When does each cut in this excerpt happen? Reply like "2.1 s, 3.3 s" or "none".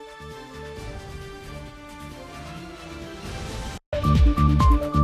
3.8 s